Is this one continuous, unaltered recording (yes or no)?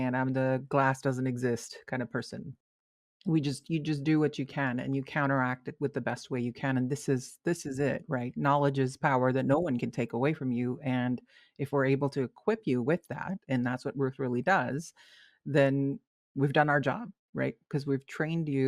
no